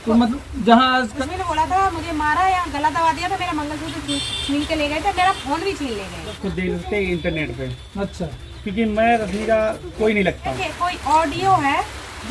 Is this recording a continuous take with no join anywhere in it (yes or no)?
no